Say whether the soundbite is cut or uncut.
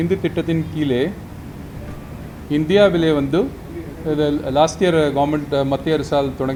uncut